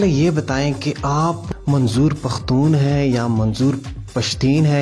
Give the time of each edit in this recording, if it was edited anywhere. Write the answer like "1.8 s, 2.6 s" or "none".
1.4 s